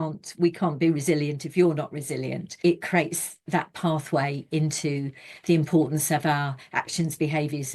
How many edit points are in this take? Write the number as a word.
two